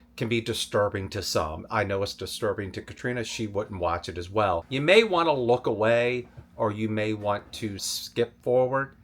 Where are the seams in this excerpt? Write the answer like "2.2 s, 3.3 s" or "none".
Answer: 4.7 s, 8.0 s

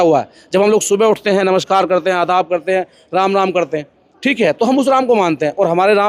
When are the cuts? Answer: none

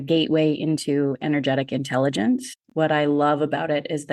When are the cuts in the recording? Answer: none

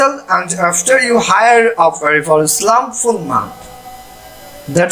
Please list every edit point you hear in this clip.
none

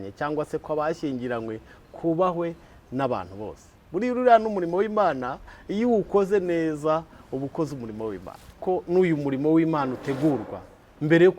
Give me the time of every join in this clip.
8.6 s

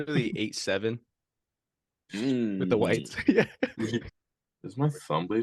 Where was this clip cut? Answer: 4.1 s

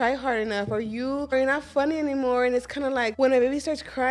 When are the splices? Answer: 1.3 s, 3.1 s

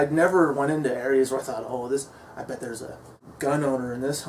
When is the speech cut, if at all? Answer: 3.2 s

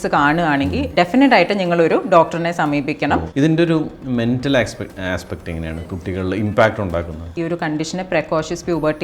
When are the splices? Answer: 3.3 s, 7.3 s

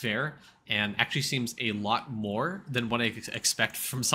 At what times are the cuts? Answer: none

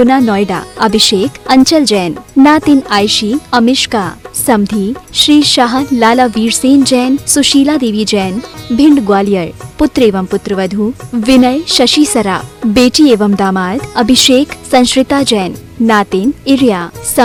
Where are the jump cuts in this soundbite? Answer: none

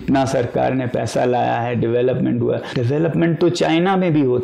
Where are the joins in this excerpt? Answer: 2.7 s

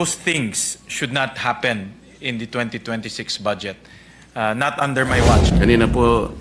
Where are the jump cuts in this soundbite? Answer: 5.5 s

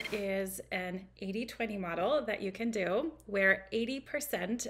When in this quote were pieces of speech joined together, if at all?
none

